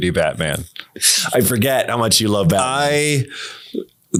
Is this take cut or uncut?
uncut